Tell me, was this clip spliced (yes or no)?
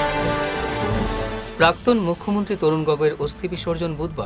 no